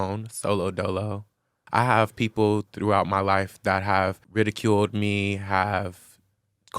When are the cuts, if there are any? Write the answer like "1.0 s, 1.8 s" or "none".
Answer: 1.5 s, 2.7 s, 4.2 s